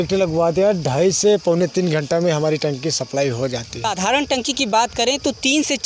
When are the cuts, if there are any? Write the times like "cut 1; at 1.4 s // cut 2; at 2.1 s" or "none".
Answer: cut 1; at 3.9 s